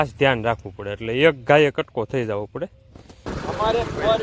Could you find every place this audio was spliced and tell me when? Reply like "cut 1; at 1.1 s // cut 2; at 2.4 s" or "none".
cut 1; at 3.3 s